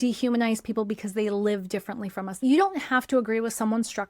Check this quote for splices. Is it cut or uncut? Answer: cut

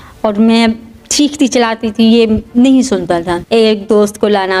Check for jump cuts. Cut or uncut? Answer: cut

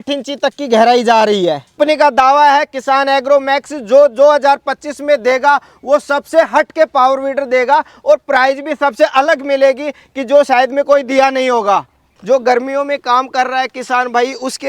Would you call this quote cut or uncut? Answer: cut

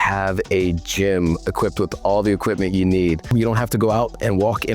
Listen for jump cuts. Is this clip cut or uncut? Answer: cut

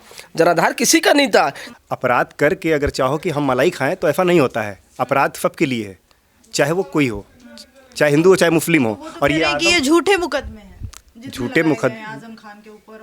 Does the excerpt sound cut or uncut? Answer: cut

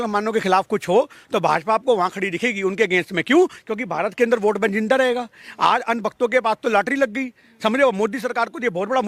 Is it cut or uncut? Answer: uncut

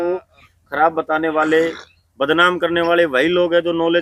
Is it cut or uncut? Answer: uncut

